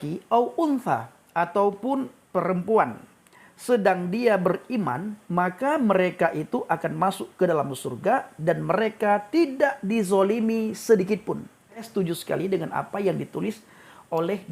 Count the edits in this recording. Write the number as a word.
one